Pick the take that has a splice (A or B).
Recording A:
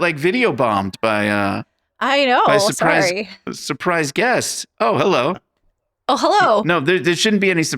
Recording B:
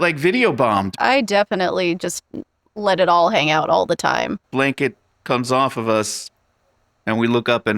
B